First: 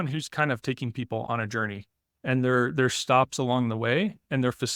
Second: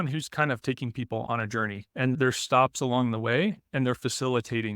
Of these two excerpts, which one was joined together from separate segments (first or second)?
second